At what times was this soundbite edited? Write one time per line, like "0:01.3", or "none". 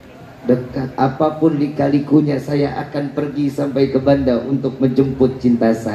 none